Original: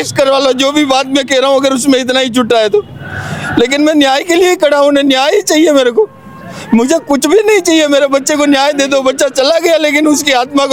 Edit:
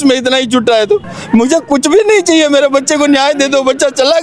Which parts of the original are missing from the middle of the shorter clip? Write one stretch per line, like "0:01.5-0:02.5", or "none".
0:03.0-0:06.5